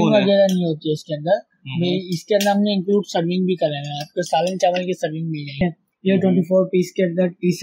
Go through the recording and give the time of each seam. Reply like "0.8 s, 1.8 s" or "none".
5.6 s